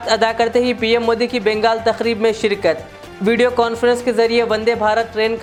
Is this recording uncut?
yes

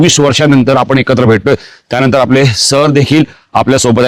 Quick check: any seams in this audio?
no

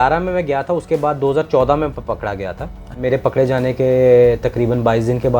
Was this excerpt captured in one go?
no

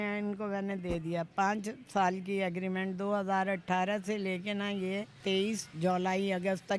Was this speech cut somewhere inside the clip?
yes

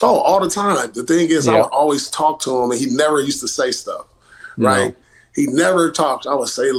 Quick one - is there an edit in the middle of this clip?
no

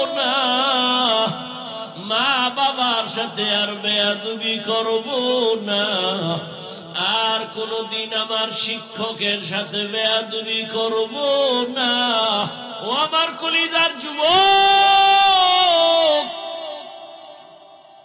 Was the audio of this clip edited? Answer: yes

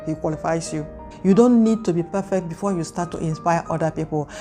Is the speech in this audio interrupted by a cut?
no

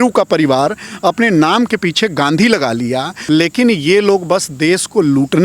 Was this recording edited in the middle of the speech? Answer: yes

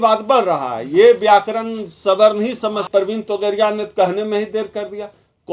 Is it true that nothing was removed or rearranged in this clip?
no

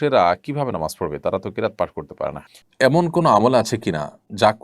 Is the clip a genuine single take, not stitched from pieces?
no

